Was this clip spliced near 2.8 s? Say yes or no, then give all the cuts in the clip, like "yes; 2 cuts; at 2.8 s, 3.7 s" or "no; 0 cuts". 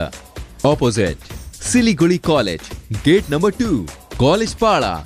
no; 0 cuts